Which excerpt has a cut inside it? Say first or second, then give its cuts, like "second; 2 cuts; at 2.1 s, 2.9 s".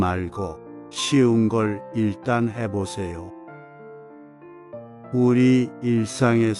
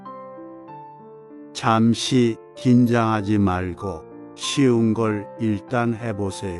second; 1 cut; at 1.2 s